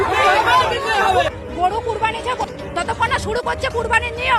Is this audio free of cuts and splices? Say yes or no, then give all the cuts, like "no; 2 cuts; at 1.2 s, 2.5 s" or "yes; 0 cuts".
no; 1 cut; at 2.5 s